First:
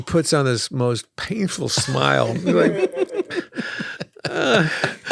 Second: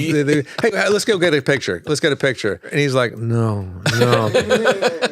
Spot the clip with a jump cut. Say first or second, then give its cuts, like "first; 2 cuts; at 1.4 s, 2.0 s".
second; 1 cut; at 2.7 s